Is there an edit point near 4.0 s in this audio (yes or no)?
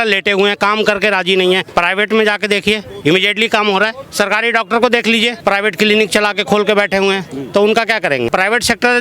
yes